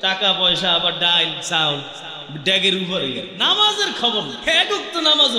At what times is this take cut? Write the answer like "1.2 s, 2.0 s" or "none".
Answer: 3.3 s, 4.3 s